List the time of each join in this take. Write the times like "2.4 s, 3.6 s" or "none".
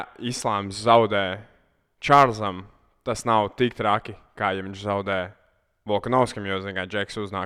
none

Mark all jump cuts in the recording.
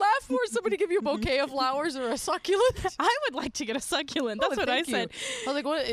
none

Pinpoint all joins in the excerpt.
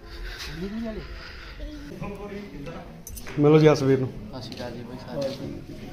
1.9 s

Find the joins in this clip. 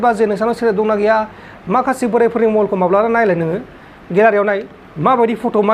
1.4 s

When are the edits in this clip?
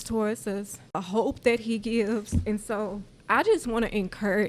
1.0 s, 3.1 s

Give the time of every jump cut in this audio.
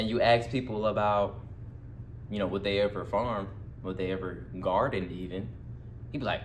none

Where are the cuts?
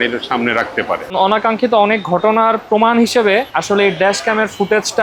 1.1 s, 3.5 s

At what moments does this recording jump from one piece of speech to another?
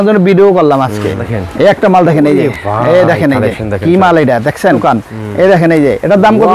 1.3 s, 4.8 s

